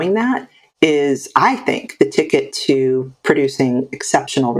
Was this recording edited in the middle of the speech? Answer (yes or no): no